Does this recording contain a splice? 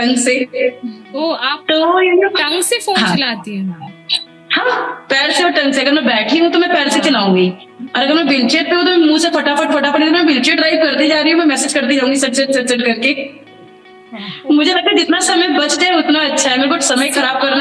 no; 0 cuts

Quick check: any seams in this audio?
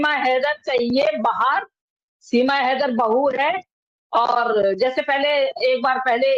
no; 0 cuts

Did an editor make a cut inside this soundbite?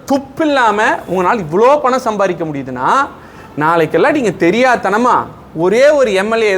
no; 0 cuts

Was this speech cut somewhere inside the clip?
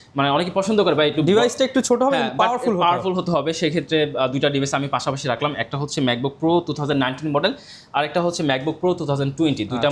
no; 0 cuts

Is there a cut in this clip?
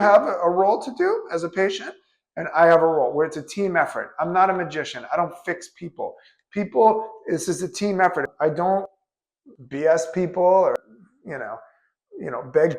yes; 1 cut; at 8.3 s

